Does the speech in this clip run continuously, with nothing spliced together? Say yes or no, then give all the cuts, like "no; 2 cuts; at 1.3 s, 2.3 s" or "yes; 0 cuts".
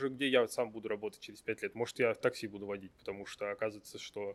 yes; 0 cuts